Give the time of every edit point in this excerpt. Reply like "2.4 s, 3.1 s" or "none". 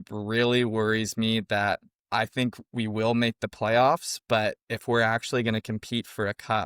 none